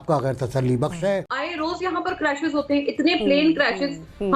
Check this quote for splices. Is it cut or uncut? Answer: cut